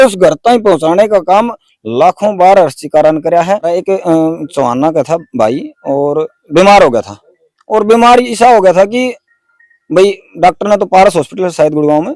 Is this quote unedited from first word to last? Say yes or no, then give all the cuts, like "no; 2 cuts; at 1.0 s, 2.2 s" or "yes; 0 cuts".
no; 1 cut; at 3.8 s